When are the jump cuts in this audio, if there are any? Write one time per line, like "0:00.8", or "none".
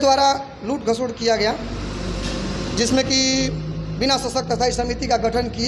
none